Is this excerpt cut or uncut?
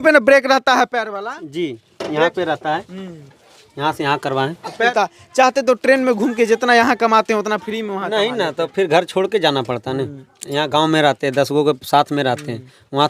cut